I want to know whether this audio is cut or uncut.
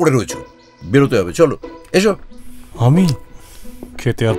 uncut